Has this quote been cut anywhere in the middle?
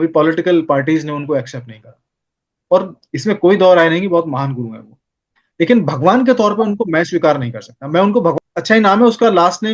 yes; 1 cut; at 8.3 s

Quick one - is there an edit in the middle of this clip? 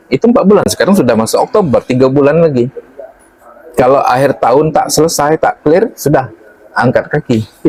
no; 0 cuts

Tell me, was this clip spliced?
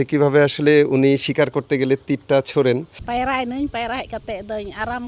yes; 1 cut; at 3.0 s

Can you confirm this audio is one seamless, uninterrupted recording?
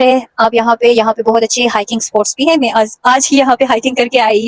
yes; 0 cuts

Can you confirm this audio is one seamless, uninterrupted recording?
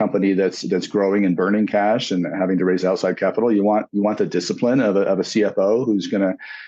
yes; 0 cuts

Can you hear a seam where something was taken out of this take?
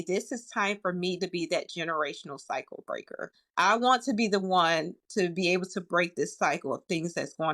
yes; 1 cut; at 3.4 s

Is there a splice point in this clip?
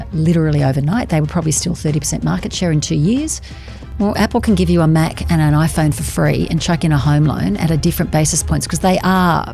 yes; 1 cut; at 3.8 s

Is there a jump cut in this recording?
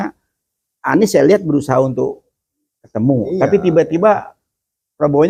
no; 0 cuts

